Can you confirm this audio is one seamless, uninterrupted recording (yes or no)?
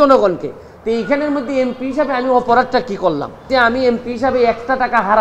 no